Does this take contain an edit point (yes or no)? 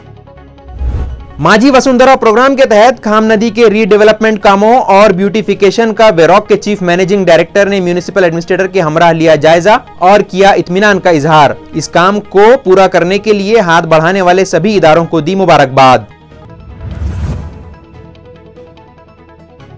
no